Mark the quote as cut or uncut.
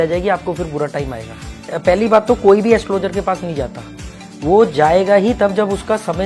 cut